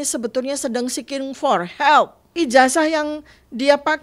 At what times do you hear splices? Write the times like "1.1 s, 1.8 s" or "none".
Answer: 2.4 s